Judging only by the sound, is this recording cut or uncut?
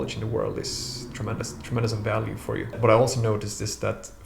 cut